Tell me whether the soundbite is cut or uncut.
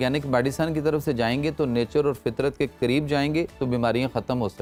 uncut